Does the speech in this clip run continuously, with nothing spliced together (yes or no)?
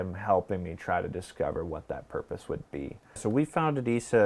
no